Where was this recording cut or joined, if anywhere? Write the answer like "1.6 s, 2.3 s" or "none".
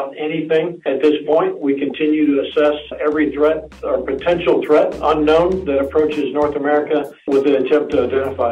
0.9 s, 2.9 s, 7.3 s